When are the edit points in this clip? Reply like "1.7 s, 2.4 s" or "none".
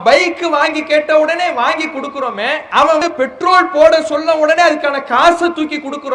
3.0 s